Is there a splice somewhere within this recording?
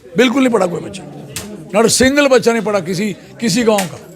no; 0 cuts

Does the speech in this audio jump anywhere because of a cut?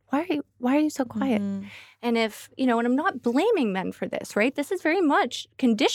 no; 0 cuts

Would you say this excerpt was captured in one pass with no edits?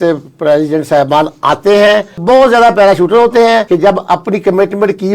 no; 2 cuts; at 2.2 s, 3.7 s

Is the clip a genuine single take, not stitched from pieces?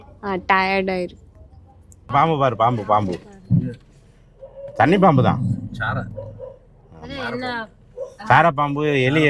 no; 1 cut; at 2.1 s

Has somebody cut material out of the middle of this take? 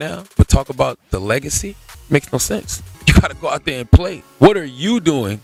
no; 0 cuts

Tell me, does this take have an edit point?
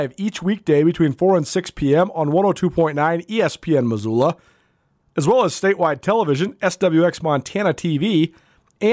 no; 0 cuts

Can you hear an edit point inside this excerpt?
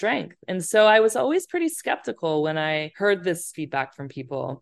yes; 2 cuts; at 2.9 s, 3.5 s

